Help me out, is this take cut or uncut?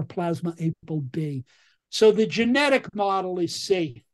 uncut